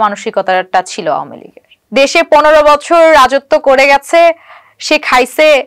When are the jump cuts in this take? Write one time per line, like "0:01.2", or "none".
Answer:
0:01.8